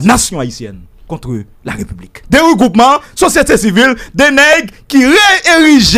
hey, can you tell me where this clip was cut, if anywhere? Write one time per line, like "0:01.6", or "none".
0:02.2